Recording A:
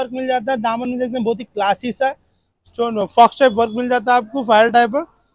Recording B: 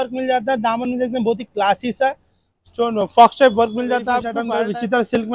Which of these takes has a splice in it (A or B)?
B